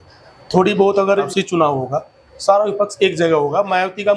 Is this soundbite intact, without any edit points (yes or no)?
no